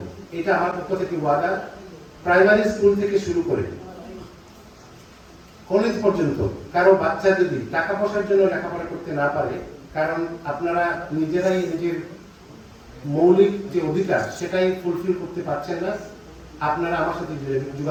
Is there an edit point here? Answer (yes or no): no